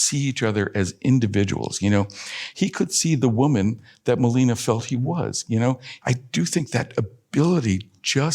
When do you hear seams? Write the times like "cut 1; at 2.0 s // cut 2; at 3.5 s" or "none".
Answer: cut 1; at 2.4 s // cut 2; at 5.9 s